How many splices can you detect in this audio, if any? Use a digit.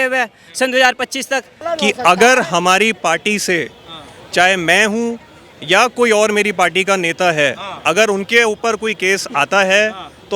1